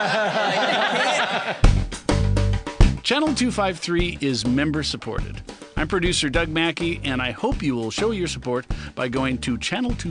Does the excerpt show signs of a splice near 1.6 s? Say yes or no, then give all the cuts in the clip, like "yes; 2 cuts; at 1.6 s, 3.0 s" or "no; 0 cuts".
yes; 1 cut; at 1.6 s